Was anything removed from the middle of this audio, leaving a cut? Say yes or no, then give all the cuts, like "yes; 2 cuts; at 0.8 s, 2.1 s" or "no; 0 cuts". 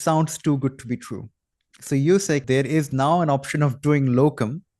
yes; 1 cut; at 2.4 s